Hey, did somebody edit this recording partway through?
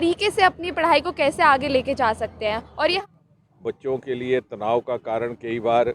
yes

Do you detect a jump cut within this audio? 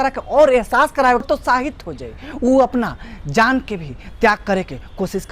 yes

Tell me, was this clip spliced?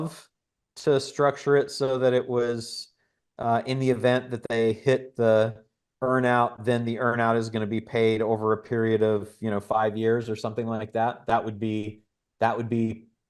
no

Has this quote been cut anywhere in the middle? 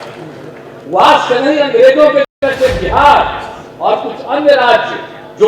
yes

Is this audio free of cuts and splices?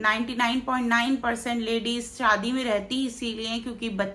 yes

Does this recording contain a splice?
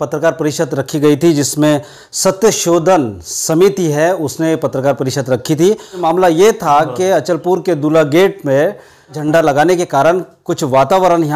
yes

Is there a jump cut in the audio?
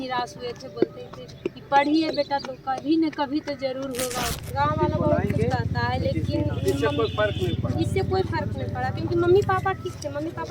yes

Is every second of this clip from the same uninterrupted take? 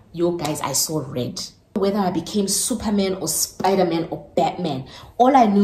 no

